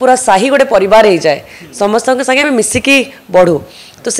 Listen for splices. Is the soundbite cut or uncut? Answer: uncut